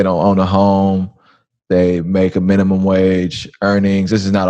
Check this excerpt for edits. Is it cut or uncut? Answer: uncut